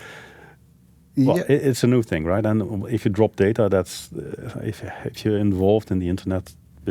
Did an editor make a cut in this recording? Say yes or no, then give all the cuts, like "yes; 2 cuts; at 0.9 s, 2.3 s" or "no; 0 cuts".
no; 0 cuts